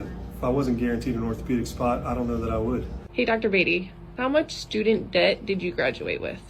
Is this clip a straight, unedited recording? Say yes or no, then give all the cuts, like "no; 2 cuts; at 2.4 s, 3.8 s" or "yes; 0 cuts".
yes; 0 cuts